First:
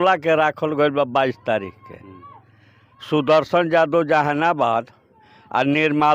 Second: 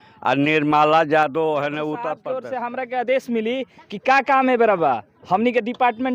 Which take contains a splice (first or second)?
second